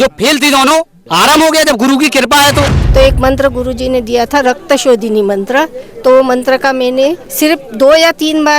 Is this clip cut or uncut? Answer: cut